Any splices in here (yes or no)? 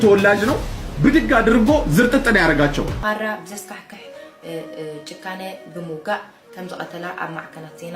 yes